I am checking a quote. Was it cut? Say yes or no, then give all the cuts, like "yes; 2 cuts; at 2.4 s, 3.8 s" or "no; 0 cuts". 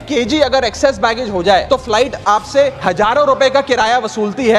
yes; 2 cuts; at 1.6 s, 2.8 s